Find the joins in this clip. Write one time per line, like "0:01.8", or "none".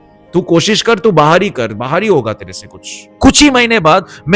0:03.1